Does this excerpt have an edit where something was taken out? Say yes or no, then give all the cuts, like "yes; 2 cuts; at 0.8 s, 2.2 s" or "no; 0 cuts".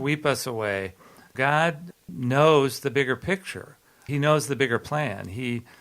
yes; 3 cuts; at 1.3 s, 2.0 s, 3.9 s